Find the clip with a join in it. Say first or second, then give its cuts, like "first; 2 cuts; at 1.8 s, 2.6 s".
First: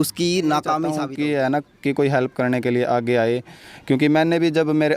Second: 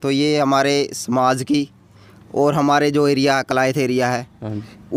first; 1 cut; at 1.0 s